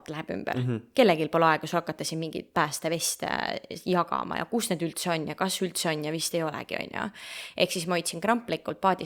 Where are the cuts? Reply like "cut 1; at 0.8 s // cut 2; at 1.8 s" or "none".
none